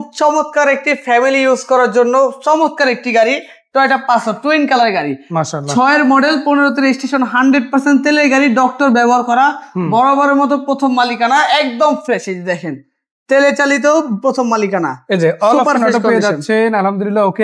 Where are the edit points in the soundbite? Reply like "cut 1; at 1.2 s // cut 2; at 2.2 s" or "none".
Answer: none

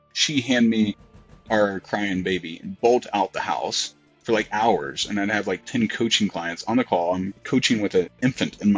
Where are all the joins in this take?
none

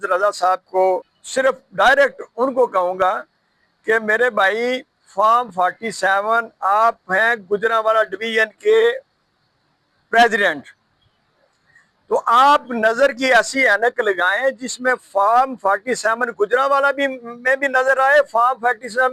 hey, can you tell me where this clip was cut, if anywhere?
cut 1; at 1.2 s

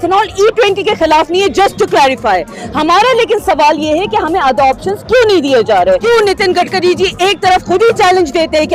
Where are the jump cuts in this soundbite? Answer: cut 1; at 6.0 s

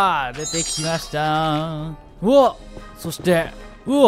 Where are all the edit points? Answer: cut 1; at 2.0 s

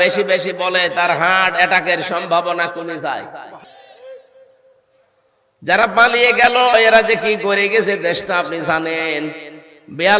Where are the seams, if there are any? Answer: cut 1; at 3.6 s

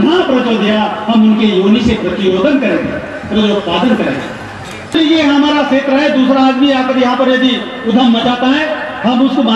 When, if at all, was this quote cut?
cut 1; at 5.0 s

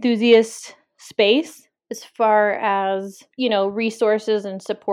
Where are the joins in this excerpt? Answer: cut 1; at 3.2 s

